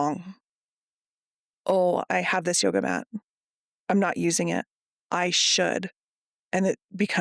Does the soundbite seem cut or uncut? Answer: uncut